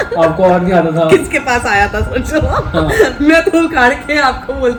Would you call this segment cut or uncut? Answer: uncut